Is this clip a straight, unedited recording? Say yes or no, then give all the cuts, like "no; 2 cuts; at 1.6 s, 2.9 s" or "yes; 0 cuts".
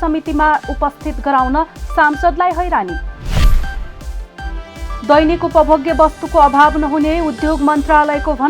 no; 1 cut; at 5.0 s